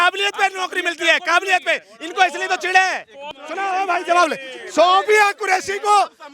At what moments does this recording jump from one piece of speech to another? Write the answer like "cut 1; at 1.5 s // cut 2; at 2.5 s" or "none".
cut 1; at 3.4 s